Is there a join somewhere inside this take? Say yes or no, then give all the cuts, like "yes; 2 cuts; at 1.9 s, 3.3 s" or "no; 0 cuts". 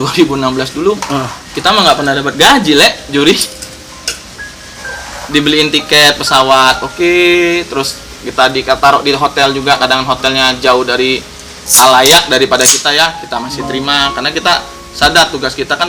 no; 0 cuts